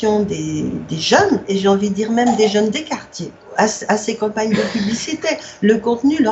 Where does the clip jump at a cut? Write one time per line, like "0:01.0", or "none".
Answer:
0:01.5
0:03.4